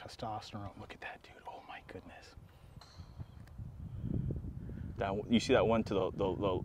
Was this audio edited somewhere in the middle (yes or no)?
no